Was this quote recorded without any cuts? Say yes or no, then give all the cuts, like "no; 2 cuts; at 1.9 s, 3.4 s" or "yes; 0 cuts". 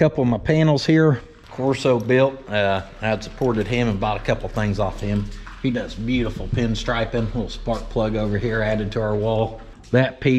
yes; 0 cuts